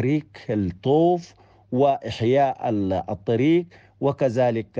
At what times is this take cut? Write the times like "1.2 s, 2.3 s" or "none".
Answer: none